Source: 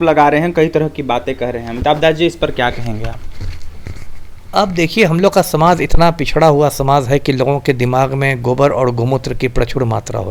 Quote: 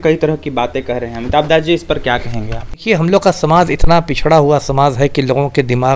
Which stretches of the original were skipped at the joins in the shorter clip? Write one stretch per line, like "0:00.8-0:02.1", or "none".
0:03.3-0:04.9